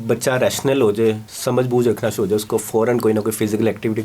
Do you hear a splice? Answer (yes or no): yes